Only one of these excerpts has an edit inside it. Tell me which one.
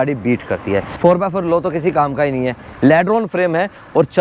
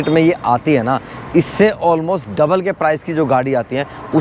first; 2 cuts; at 0.9 s, 2.6 s

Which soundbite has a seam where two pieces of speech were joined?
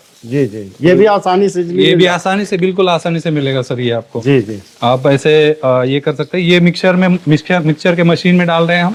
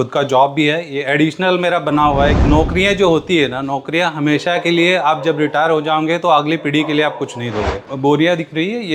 second; 2 cuts; at 2.4 s, 7.8 s

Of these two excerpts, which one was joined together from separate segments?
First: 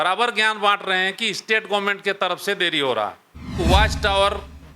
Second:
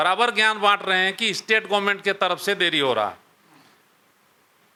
first; 1 cut; at 3.6 s

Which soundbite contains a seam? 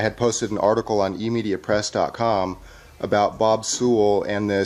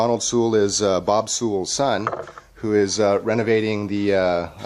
first; 1 cut; at 3.6 s

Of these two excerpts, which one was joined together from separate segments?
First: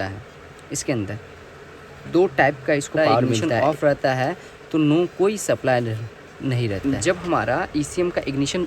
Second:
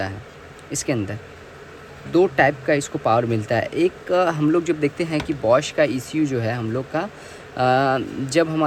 first; 2 cuts; at 3.4 s, 6.8 s

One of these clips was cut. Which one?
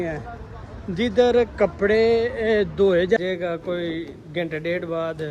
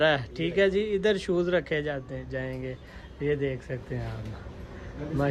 first; 1 cut; at 3.2 s

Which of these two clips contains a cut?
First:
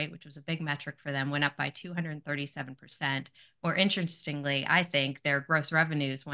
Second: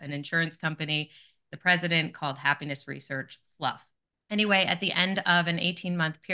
second; 1 cut; at 3.9 s

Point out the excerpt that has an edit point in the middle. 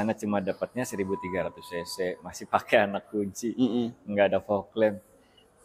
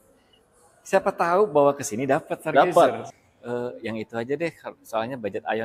second; 1 cut; at 3.1 s

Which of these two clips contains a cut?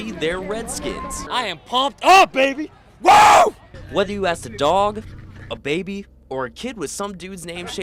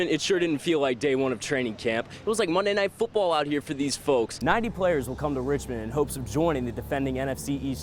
second; 1 cut; at 4.3 s

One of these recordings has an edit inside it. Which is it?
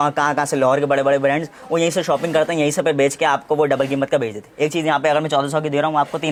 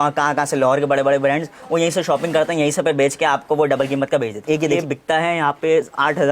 second; 1 cut; at 4.6 s

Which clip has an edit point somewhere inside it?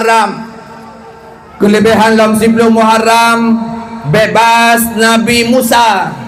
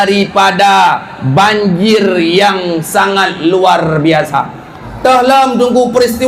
second; 1 cut; at 4.9 s

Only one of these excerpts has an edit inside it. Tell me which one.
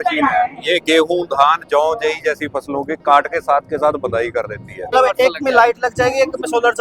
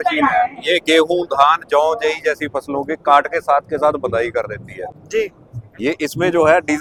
first; 1 cut; at 4.9 s

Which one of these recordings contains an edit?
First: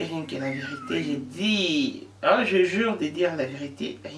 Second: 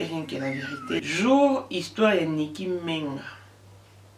second; 1 cut; at 1.0 s

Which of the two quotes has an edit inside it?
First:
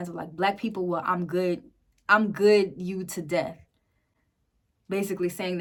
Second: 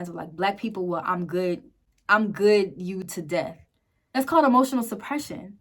second; 1 cut; at 4.2 s

